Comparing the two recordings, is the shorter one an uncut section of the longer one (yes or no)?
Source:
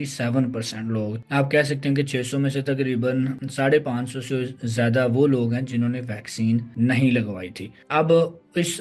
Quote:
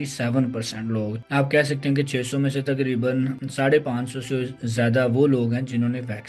yes